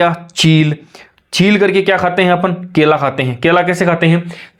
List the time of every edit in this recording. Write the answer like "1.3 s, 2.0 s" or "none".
none